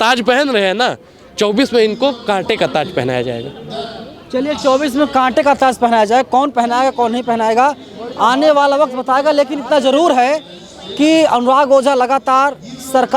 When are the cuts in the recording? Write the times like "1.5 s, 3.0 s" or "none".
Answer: none

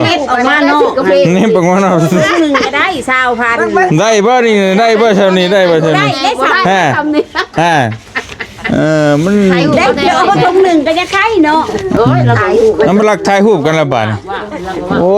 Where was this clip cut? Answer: 12.0 s

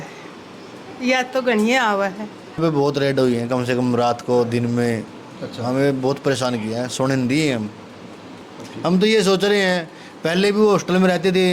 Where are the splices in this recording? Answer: 2.6 s, 8.3 s

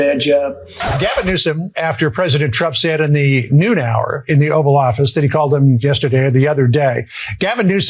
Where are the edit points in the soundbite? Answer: 0.9 s

